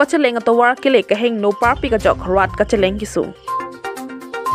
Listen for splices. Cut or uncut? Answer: uncut